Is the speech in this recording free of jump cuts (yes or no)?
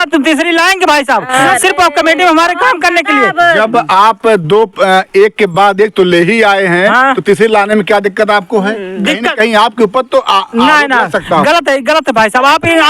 yes